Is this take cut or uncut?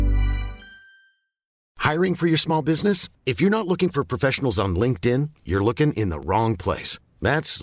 cut